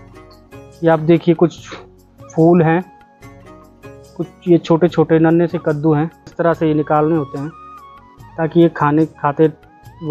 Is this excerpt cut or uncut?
cut